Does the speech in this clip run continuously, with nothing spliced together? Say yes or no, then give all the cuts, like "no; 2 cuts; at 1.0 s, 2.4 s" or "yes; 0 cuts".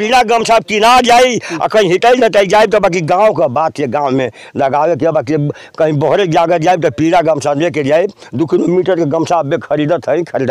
yes; 0 cuts